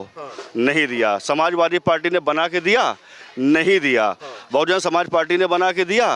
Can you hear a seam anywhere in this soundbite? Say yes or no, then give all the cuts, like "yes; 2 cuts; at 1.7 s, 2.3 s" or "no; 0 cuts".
no; 0 cuts